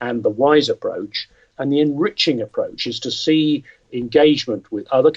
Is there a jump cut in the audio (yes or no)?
yes